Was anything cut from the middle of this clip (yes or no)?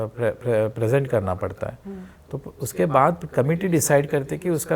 no